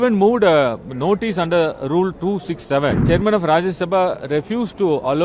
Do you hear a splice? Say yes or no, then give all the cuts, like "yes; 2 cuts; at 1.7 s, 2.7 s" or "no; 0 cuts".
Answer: yes; 1 cut; at 3.0 s